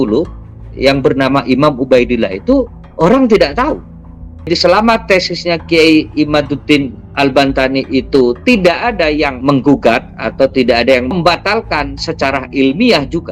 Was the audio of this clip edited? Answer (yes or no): yes